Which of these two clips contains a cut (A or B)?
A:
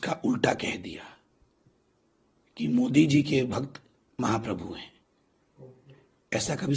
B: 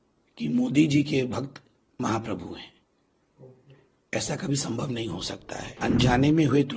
B